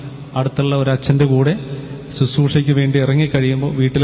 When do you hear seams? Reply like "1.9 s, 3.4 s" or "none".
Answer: none

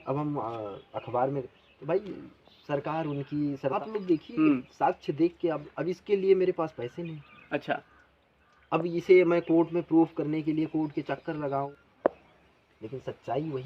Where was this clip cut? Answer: 3.8 s, 11.7 s

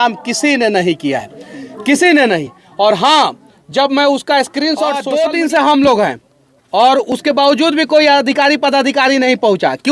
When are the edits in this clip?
5.0 s

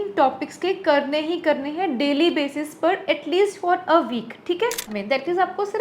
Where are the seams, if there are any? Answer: 4.8 s

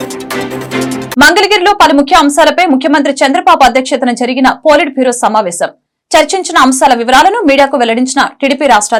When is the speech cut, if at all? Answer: none

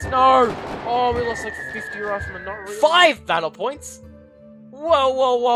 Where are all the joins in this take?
2.6 s

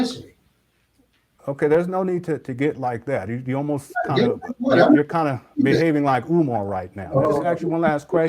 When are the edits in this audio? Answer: 7.2 s

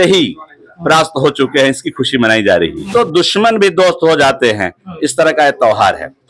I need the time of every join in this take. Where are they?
2.9 s

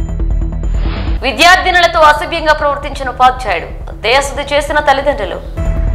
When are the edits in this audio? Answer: 0.9 s

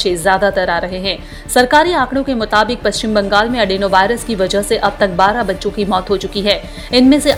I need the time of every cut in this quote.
none

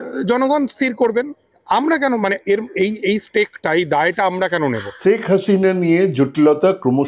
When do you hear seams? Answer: 4.9 s

